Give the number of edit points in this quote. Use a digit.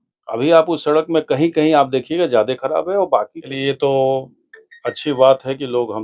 1